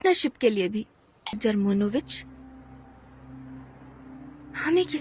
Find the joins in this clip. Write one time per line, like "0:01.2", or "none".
0:01.4